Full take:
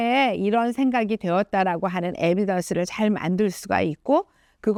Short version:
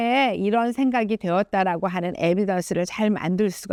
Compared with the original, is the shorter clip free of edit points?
yes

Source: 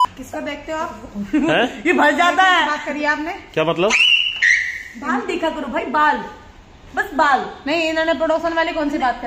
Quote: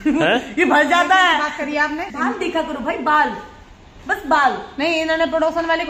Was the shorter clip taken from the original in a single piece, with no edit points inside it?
no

